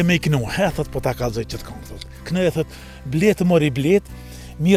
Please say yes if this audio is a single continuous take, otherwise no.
yes